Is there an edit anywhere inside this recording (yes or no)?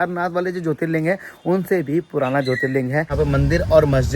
yes